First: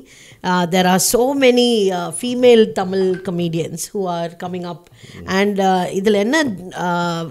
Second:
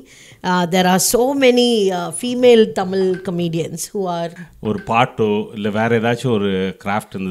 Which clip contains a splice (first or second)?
second